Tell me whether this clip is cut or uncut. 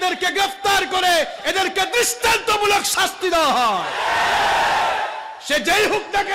uncut